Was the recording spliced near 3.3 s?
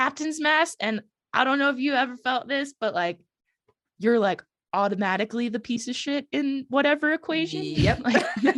no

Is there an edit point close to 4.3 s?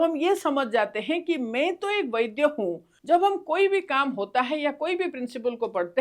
no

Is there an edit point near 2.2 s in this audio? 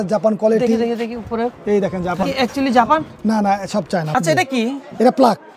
yes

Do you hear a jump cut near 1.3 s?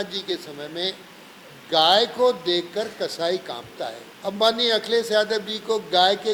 no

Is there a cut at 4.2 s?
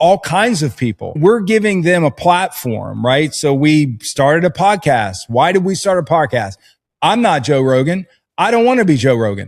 no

